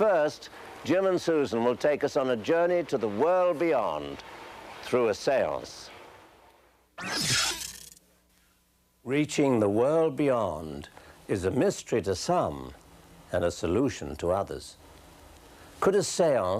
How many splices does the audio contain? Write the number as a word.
one